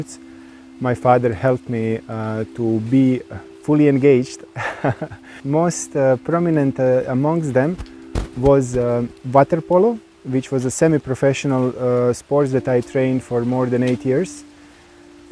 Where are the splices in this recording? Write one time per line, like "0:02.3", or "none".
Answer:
0:05.4
0:09.2